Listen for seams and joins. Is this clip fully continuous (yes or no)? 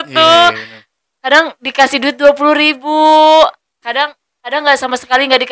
yes